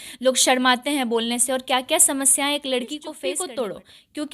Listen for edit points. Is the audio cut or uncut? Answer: cut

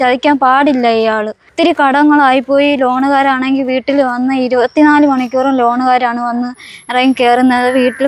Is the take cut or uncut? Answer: cut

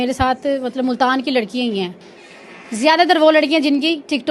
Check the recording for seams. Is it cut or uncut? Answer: uncut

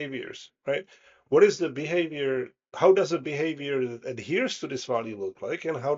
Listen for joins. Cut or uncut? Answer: uncut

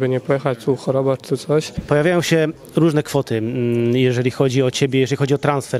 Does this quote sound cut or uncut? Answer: cut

